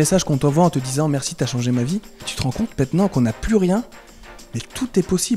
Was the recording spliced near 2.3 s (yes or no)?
yes